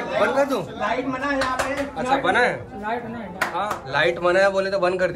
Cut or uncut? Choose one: uncut